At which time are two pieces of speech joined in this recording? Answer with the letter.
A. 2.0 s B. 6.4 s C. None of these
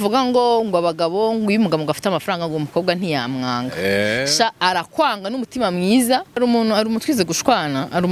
B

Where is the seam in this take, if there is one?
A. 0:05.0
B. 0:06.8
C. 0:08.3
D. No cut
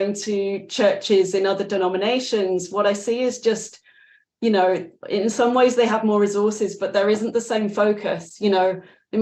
D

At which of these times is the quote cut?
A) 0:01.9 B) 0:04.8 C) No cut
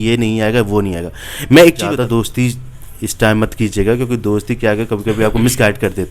A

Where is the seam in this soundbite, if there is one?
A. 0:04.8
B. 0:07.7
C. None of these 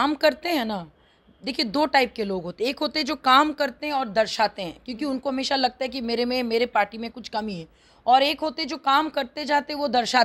C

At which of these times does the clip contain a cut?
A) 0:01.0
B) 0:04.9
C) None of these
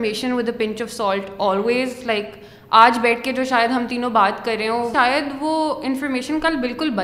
B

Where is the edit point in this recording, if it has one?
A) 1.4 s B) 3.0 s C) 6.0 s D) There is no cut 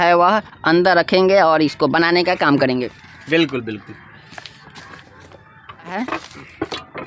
C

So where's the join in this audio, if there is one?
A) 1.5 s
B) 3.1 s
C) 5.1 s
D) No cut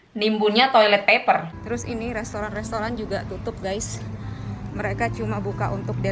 A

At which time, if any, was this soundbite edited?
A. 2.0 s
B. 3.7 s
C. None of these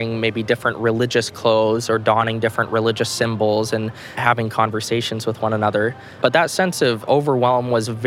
C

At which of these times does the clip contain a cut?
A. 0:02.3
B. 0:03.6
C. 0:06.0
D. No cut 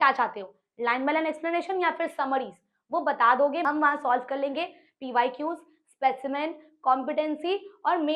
B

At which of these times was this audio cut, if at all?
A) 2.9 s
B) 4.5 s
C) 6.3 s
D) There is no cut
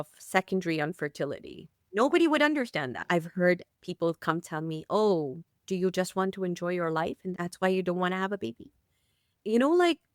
A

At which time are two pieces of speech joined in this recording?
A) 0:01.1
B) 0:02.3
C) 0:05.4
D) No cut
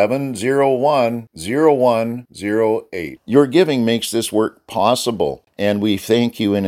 C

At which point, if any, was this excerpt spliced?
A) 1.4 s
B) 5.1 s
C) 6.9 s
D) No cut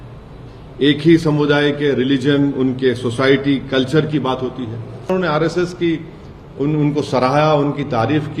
B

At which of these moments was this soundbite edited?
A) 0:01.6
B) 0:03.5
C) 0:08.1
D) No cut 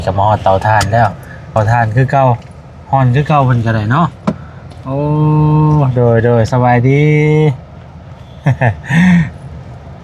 A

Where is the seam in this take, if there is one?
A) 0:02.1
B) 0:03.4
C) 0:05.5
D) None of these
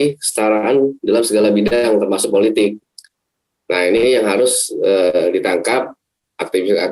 D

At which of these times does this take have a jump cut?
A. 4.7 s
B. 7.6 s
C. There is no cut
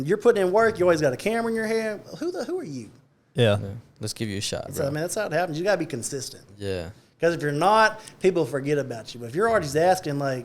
A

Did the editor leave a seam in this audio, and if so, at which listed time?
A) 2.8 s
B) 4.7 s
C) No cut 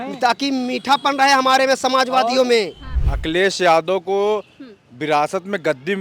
A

